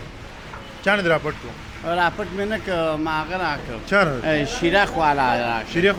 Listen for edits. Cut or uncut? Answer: uncut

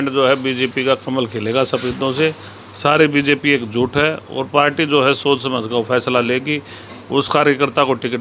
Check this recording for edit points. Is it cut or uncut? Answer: uncut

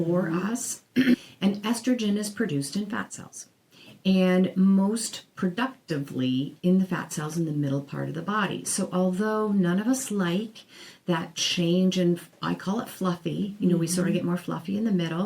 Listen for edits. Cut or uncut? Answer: cut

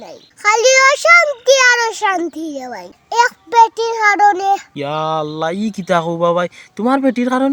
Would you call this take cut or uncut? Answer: uncut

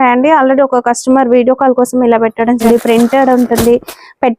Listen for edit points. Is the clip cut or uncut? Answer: cut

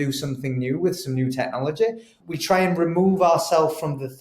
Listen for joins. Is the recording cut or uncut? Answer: cut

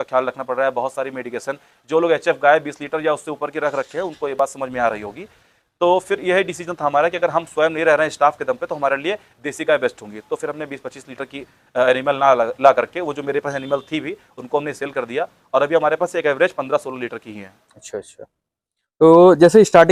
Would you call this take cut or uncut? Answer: uncut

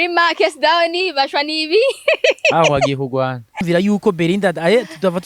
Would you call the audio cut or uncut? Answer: cut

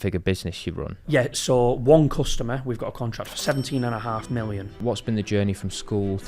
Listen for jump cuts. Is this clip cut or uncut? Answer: cut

